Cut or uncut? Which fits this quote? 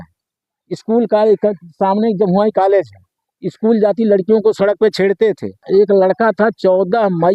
cut